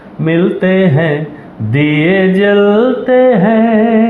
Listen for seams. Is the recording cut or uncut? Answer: uncut